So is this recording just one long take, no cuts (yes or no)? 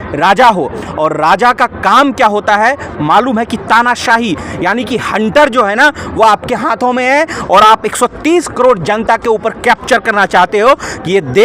yes